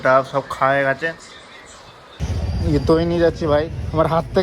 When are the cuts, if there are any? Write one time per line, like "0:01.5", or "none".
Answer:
0:02.3